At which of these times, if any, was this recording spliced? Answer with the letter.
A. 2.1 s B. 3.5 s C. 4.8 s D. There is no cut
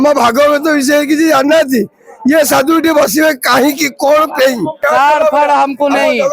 C